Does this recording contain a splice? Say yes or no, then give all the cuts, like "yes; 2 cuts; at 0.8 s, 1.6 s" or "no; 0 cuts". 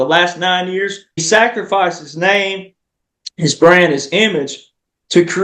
yes; 1 cut; at 1.2 s